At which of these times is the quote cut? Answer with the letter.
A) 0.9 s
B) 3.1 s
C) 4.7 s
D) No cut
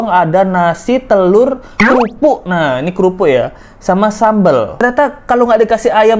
C